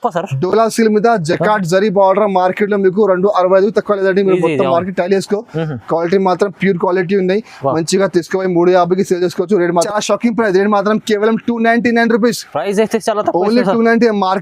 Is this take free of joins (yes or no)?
no